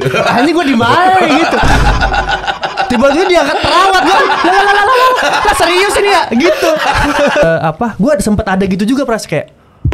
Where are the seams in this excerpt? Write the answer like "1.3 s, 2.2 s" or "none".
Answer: 7.4 s